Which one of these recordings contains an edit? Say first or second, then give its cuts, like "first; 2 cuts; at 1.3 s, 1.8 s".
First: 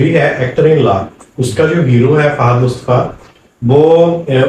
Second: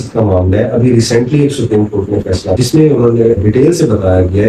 second; 2 cuts; at 2.6 s, 3.4 s